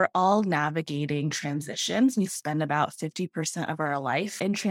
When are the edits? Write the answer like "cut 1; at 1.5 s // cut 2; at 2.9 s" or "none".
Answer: none